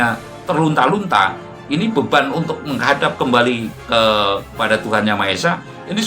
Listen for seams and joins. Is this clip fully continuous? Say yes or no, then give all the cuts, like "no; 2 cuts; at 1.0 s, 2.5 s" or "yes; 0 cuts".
no; 1 cut; at 3.7 s